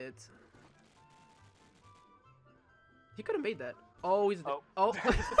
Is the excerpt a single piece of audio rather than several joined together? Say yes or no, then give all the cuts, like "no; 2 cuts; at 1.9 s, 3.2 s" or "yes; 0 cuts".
yes; 0 cuts